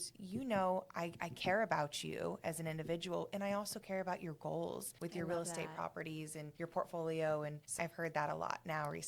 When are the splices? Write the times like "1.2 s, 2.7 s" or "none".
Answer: 7.7 s